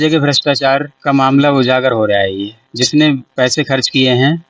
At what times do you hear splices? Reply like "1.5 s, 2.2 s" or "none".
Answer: 0.9 s, 2.6 s